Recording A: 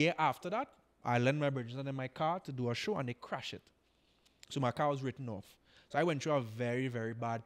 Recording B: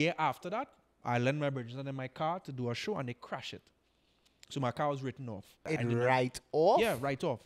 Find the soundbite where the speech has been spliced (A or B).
B